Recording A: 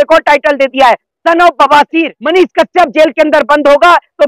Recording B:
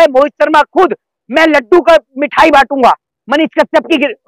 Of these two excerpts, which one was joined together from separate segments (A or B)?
A